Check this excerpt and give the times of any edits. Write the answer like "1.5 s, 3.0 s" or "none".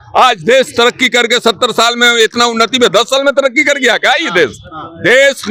none